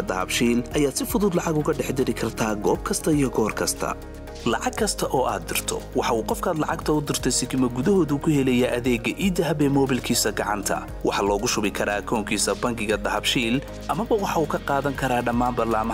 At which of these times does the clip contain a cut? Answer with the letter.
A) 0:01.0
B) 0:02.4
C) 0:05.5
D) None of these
D